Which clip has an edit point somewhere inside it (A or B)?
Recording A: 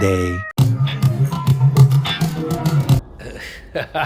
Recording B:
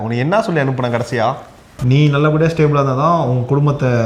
B